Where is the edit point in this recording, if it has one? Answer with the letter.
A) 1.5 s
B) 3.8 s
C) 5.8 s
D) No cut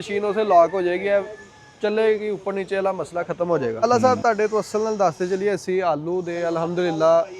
B